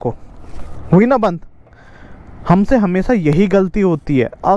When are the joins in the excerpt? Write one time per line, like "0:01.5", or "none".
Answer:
none

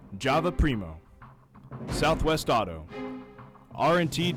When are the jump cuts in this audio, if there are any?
none

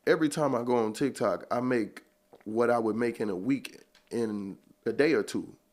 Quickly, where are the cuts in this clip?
0:04.8

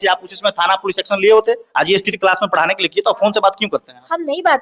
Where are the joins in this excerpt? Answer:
0:02.1

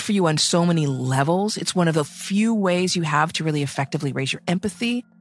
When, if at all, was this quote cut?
none

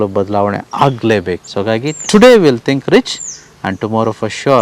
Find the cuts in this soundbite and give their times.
0:01.4

